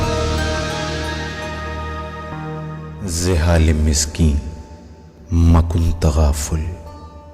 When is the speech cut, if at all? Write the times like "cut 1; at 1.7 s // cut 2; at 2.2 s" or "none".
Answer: cut 1; at 3.1 s